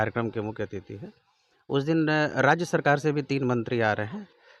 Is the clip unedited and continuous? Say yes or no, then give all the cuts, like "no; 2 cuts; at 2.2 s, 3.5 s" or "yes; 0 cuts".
yes; 0 cuts